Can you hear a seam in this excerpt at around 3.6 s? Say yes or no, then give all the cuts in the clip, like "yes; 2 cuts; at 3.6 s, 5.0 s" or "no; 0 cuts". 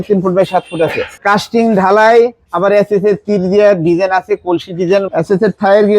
no; 2 cuts; at 1.2 s, 5.1 s